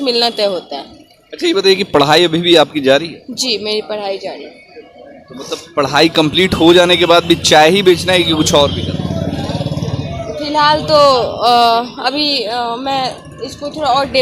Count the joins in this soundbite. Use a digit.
0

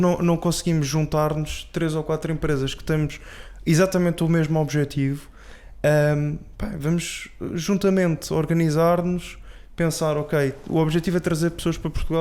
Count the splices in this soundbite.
0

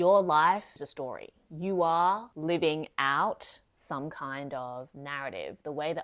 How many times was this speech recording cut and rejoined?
1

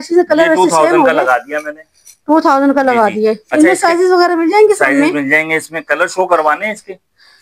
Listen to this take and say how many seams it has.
0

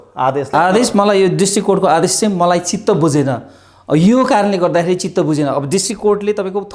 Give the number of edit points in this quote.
0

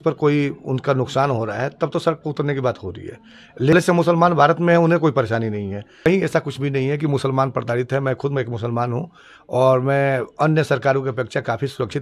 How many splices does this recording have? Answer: 2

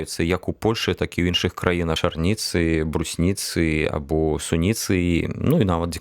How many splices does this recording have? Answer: 1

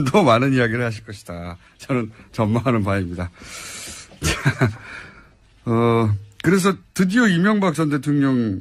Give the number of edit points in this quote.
1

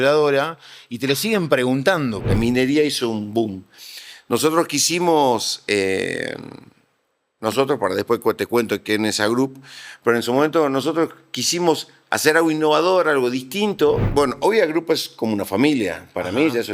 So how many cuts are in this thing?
2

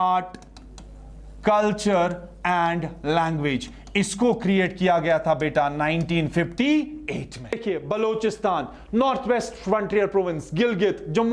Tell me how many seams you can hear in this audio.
1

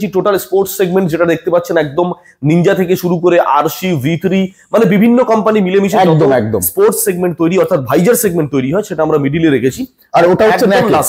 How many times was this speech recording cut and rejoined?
0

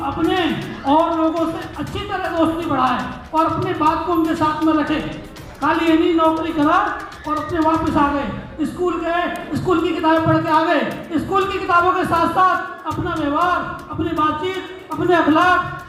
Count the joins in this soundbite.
0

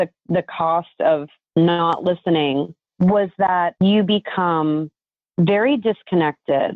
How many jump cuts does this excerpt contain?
3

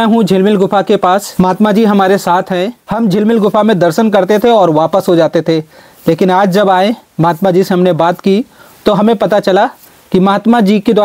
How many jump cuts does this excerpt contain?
2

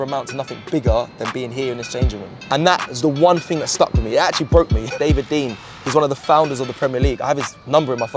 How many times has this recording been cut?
2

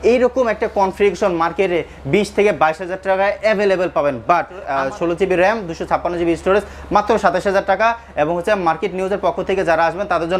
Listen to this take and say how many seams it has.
1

